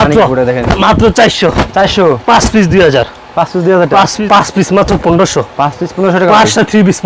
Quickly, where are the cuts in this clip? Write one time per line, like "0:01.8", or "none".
0:04.2